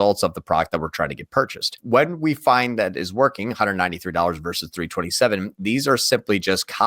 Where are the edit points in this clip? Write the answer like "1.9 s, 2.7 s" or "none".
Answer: 1.8 s